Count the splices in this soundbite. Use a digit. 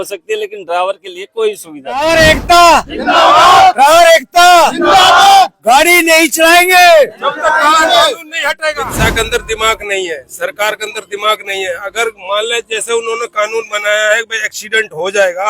2